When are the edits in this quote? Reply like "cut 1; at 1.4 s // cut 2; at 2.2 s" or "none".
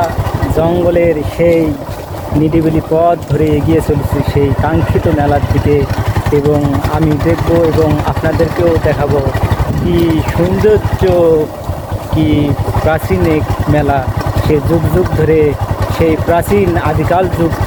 none